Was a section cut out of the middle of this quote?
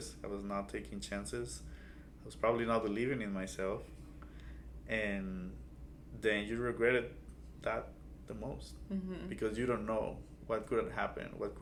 no; 0 cuts

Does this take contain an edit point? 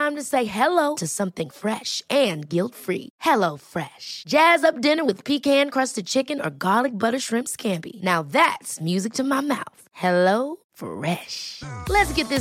no; 0 cuts

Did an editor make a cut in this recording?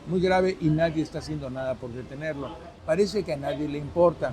yes; 1 cut; at 2.7 s

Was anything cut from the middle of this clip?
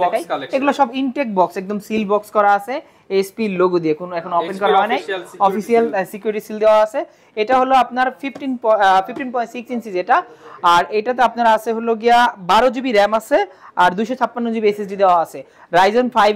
no; 0 cuts

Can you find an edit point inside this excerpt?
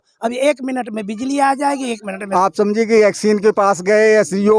yes; 1 cut; at 2.2 s

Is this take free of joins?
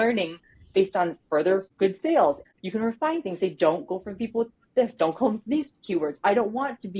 no; 2 cuts; at 1.7 s, 2.4 s

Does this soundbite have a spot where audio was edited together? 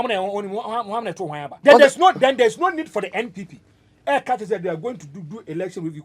yes; 1 cut; at 1.5 s

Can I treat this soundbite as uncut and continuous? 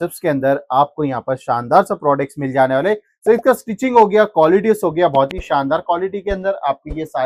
yes; 0 cuts

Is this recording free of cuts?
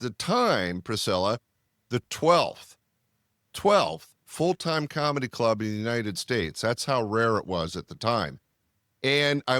yes; 0 cuts

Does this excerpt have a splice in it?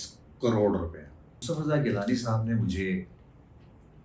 yes; 1 cut; at 1.4 s

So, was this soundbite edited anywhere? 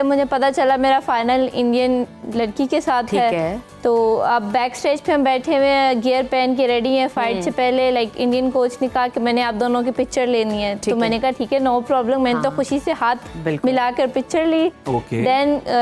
no; 0 cuts

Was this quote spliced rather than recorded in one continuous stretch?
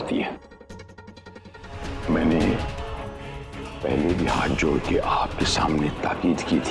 yes; 1 cut; at 1.9 s

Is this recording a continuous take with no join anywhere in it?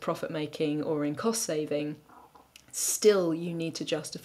yes; 0 cuts

